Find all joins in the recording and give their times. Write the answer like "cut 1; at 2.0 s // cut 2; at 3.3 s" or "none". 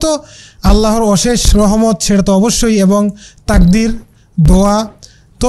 none